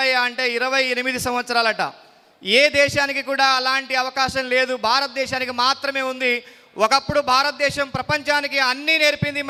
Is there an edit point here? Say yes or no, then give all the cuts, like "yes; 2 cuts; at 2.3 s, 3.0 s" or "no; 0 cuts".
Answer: no; 0 cuts